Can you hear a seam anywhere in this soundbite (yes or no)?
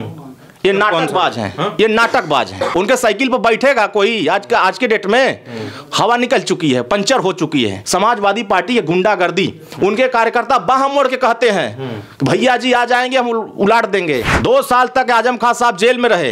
yes